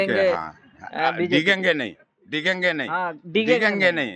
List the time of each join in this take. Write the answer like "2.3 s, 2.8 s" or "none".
none